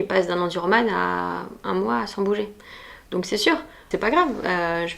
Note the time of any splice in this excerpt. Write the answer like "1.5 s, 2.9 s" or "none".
3.9 s

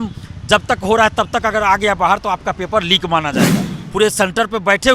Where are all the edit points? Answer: 3.8 s

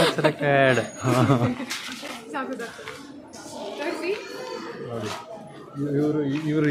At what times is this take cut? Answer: none

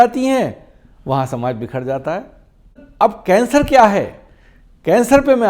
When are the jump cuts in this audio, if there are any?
2.8 s

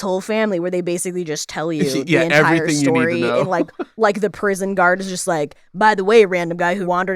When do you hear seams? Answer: 3.8 s

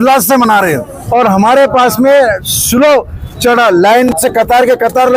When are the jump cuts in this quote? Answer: 0.9 s

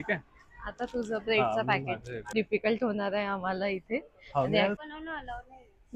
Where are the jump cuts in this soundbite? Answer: 2.3 s, 4.8 s

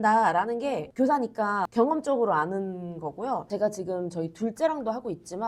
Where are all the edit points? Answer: 1.7 s, 3.4 s

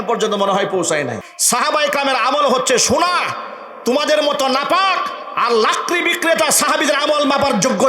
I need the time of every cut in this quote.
1.3 s

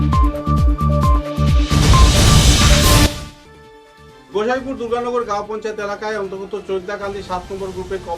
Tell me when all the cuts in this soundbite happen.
3.0 s

